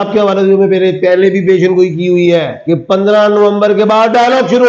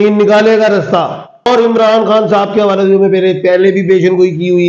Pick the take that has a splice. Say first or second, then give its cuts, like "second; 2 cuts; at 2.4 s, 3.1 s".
second; 1 cut; at 1.5 s